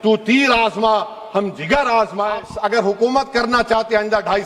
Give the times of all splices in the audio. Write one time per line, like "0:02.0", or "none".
0:02.5

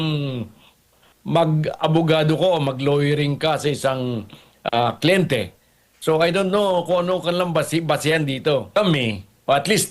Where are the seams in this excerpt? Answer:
0:08.7

